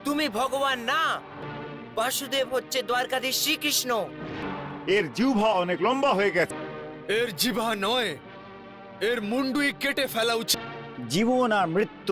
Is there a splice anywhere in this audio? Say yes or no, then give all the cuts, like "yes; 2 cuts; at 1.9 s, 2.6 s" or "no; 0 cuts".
yes; 4 cuts; at 1.4 s, 4.4 s, 6.5 s, 10.5 s